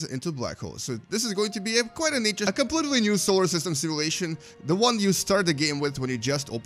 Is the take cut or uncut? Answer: uncut